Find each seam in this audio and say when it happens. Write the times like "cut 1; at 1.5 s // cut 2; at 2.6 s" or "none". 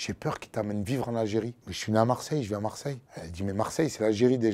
none